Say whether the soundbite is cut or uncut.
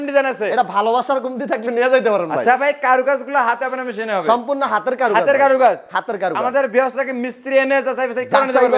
uncut